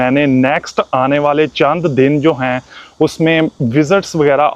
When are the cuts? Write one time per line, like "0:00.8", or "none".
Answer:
none